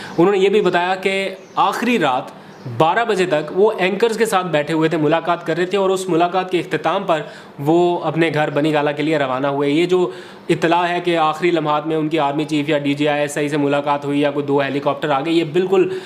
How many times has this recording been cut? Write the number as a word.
zero